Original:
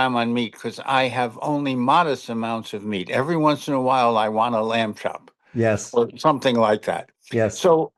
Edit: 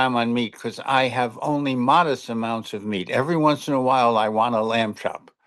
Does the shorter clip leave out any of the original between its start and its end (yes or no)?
no